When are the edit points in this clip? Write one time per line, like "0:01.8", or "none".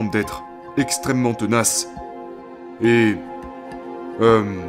none